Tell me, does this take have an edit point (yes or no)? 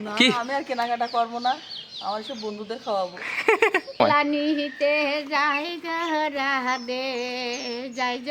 yes